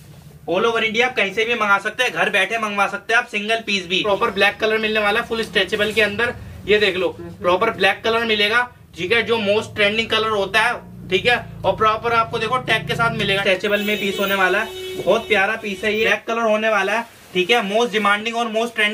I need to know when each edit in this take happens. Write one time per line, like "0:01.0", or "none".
0:04.0
0:13.4
0:16.2